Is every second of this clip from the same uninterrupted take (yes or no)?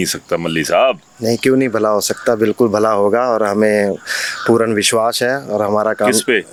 yes